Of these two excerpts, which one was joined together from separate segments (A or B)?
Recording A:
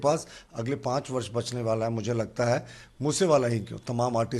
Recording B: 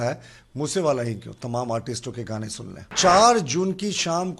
B